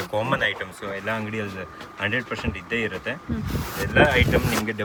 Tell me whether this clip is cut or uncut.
uncut